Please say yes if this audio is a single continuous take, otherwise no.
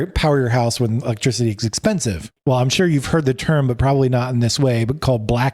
no